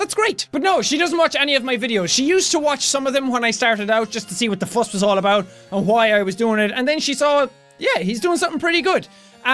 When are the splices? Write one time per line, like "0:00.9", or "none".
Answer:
0:01.7